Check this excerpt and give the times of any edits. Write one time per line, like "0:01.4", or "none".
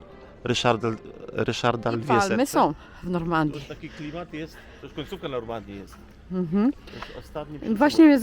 0:02.1

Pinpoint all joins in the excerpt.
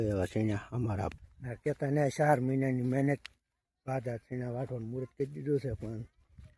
0:01.1

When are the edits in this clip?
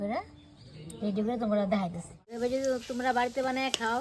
0:02.4

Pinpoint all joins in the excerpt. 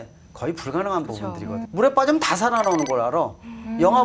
0:01.7

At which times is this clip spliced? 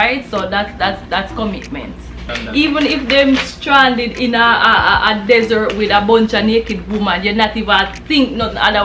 0:02.3

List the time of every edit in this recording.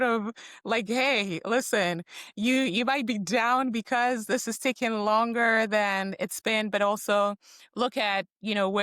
none

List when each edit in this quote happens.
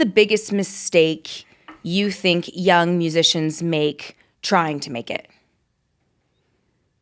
none

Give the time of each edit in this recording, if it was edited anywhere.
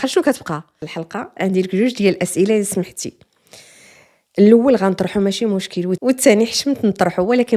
0:01.0

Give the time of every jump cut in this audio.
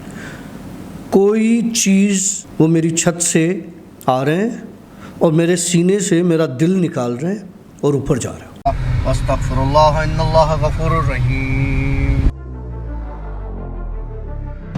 0:02.4
0:08.6

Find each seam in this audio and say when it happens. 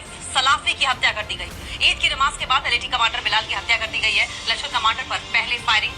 none

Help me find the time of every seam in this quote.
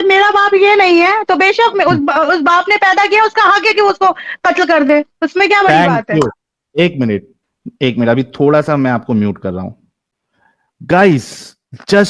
none

